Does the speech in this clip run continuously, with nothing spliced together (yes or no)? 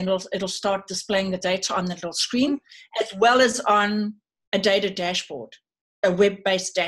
yes